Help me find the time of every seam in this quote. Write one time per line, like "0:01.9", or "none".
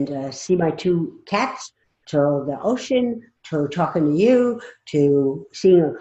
none